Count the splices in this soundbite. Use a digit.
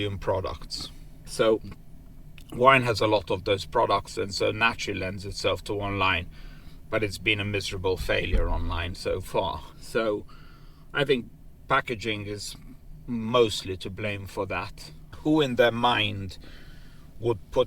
3